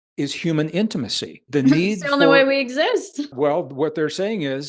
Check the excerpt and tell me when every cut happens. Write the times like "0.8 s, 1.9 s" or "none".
1.4 s, 3.3 s